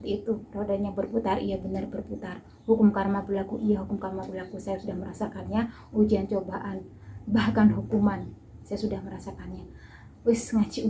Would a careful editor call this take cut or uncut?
uncut